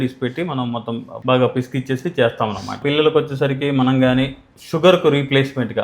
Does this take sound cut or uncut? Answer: cut